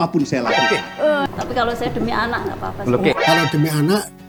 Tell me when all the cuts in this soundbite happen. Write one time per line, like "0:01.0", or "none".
none